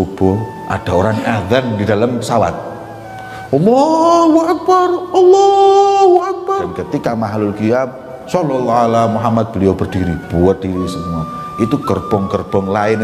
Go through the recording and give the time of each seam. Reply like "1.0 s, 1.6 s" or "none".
6.8 s